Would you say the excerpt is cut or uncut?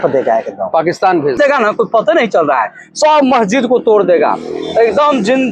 cut